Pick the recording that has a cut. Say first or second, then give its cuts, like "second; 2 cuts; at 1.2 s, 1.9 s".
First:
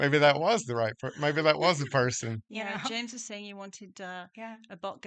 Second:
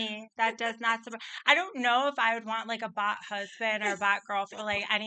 first; 1 cut; at 2.5 s